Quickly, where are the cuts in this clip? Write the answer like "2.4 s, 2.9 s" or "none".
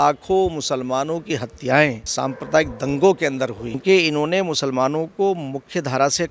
2.0 s, 3.8 s